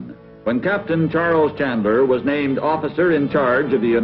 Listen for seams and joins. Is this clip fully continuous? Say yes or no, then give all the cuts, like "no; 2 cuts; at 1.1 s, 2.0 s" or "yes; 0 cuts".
no; 1 cut; at 2.5 s